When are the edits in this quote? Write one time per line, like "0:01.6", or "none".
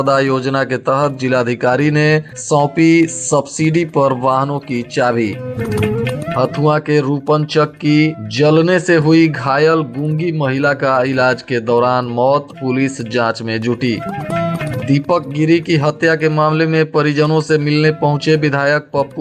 none